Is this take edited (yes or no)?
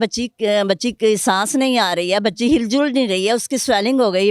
no